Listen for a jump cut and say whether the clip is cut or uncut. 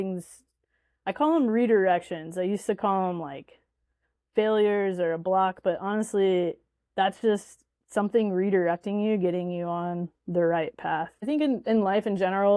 cut